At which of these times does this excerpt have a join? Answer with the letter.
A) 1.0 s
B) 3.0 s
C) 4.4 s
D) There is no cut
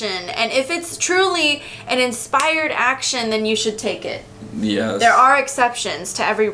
D